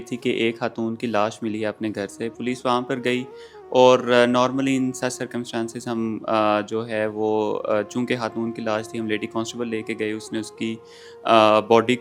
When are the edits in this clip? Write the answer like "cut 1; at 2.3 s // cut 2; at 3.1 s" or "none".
none